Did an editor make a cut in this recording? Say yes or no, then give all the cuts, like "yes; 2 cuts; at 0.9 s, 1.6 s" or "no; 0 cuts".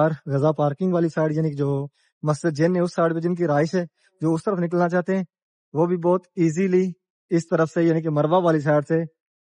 no; 0 cuts